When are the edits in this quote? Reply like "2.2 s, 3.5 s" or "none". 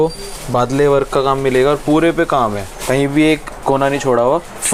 none